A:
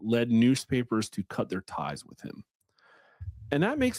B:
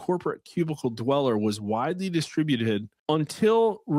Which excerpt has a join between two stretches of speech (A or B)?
B